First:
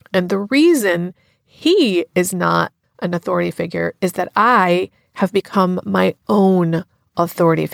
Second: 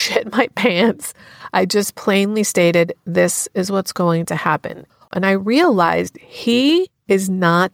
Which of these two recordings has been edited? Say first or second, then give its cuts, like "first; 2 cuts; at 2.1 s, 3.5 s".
second; 1 cut; at 5.1 s